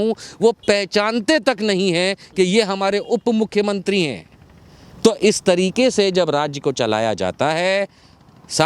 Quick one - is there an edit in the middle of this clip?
no; 0 cuts

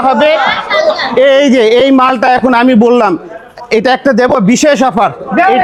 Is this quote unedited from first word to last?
yes; 0 cuts

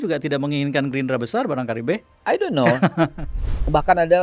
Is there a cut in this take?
yes; 1 cut; at 3.3 s

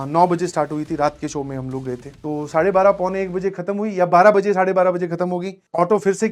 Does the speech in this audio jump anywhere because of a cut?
no; 0 cuts

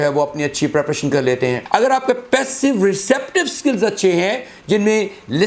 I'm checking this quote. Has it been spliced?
yes; 1 cut; at 1.6 s

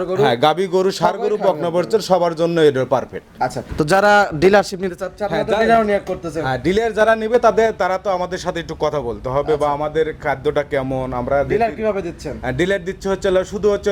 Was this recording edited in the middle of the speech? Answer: yes; 1 cut; at 3.6 s

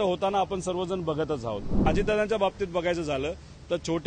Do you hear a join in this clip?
yes; 1 cut; at 1.9 s

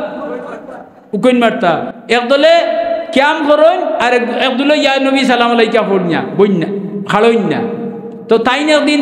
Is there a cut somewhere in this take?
yes; 1 cut; at 1.9 s

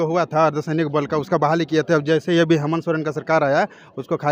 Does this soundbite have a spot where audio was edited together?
no; 0 cuts

